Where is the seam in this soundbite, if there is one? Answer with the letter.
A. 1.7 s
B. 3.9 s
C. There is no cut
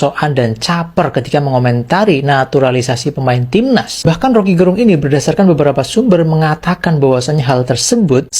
C